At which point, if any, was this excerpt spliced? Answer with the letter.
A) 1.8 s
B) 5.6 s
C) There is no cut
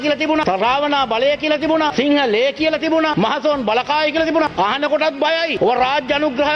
B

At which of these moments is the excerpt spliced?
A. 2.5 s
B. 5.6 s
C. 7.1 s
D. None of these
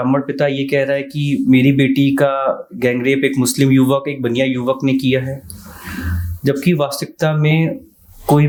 D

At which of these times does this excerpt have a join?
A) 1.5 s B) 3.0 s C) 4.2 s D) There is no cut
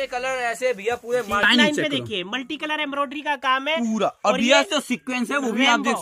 A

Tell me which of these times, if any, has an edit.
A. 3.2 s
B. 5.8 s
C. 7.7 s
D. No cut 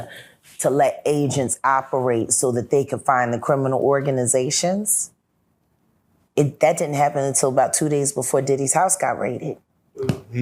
D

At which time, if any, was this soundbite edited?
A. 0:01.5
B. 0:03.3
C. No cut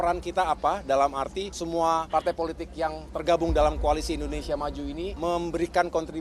A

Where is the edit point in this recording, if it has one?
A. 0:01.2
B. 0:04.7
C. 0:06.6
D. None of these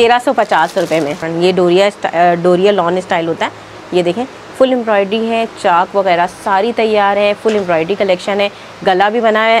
A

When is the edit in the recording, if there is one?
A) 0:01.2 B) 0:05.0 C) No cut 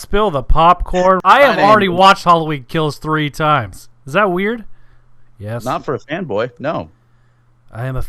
A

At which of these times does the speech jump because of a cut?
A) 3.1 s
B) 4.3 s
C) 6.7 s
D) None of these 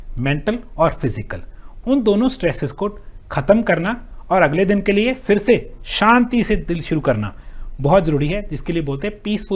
D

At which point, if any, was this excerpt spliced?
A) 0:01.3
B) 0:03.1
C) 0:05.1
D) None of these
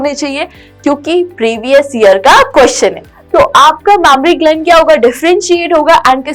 B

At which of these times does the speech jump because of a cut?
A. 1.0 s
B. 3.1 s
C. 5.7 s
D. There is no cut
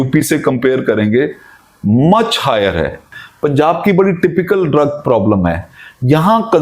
B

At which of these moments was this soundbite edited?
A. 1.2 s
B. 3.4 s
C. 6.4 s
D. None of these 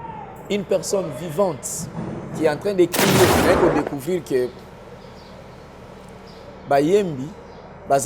B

